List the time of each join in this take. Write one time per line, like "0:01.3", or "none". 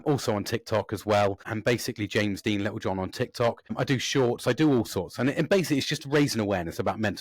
0:01.5
0:03.7